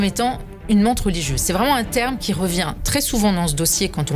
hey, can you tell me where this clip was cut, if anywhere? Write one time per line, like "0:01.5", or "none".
none